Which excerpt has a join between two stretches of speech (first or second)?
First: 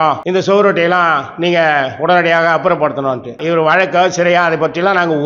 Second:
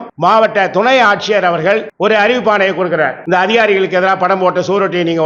first